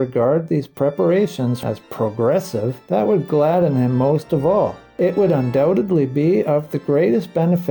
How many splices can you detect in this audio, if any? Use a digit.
3